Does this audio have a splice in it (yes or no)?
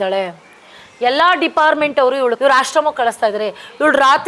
yes